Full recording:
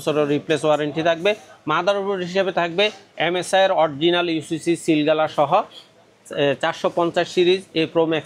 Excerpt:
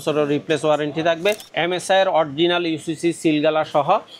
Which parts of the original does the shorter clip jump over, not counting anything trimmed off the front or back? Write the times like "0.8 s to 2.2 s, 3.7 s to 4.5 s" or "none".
1.5 s to 3.1 s